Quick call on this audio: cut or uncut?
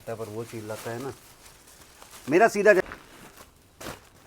cut